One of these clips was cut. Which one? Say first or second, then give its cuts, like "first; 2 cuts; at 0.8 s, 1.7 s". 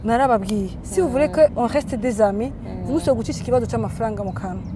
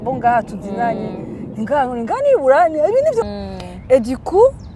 second; 1 cut; at 3.2 s